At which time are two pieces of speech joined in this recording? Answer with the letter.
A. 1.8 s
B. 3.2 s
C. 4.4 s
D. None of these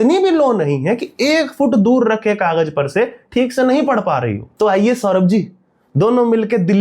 C